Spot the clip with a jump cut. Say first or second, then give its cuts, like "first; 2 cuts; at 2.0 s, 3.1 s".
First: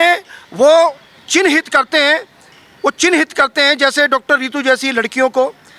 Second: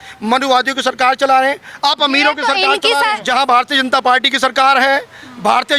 second; 1 cut; at 3.2 s